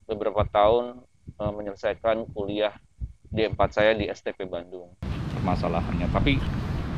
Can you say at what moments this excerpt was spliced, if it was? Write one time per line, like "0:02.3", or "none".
0:05.1